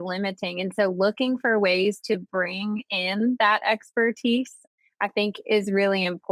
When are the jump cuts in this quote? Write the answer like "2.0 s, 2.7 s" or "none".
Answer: 4.6 s